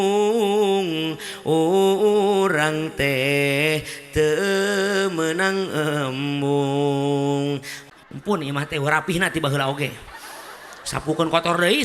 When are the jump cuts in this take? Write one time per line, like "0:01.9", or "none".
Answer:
0:07.8